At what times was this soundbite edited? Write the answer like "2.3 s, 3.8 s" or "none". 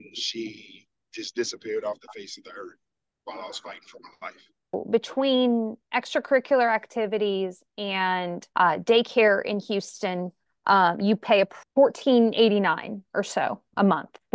4.8 s, 8.4 s, 11.6 s